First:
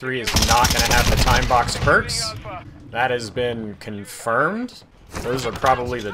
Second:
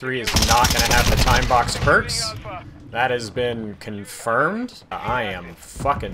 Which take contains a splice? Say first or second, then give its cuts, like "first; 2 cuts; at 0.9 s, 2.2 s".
first; 1 cut; at 4.8 s